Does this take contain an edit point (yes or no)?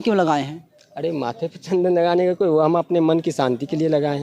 no